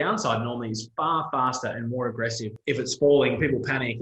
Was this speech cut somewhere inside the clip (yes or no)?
yes